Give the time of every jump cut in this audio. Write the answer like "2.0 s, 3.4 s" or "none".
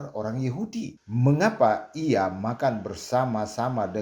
1.0 s